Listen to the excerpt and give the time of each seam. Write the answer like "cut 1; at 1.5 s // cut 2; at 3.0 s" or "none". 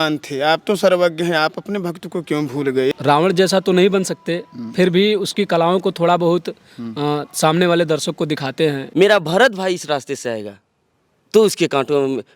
cut 1; at 2.9 s // cut 2; at 8.8 s